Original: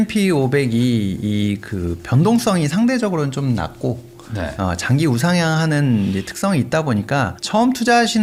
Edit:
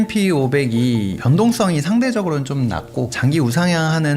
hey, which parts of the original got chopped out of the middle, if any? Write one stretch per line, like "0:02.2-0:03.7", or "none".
0:01.2-0:02.0
0:04.0-0:04.8